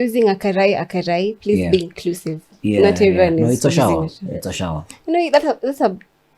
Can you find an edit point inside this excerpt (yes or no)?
no